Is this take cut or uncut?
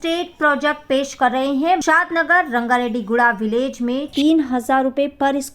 cut